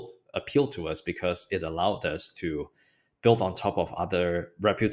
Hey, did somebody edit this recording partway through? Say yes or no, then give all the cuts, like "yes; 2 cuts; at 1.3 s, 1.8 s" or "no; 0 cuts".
no; 0 cuts